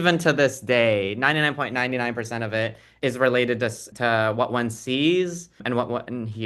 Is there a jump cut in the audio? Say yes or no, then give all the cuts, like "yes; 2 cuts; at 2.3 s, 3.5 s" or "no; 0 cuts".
yes; 3 cuts; at 2.9 s, 3.8 s, 5.6 s